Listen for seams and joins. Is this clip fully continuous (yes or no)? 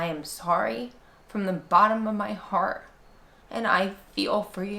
yes